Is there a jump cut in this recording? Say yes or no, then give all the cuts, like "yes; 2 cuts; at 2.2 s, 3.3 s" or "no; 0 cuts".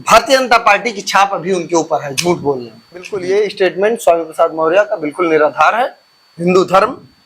yes; 1 cut; at 3.1 s